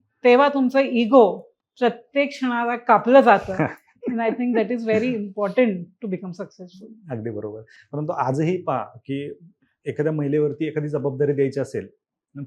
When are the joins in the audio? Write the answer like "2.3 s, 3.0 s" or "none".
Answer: none